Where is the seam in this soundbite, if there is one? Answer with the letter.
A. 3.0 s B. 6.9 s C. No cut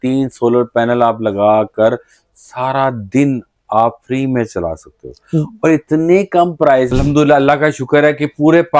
B